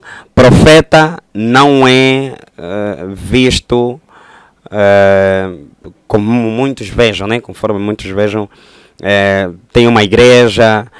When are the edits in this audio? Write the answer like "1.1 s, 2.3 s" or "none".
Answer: none